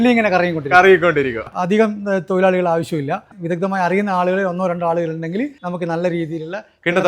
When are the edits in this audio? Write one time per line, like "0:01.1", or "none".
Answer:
0:01.4
0:03.3
0:05.6